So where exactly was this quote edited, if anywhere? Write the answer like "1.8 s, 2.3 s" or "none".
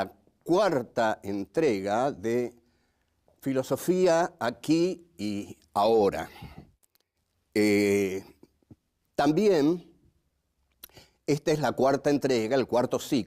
8.3 s